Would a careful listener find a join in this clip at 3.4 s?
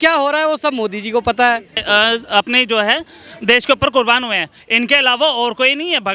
no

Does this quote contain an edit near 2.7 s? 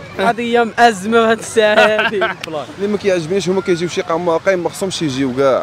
yes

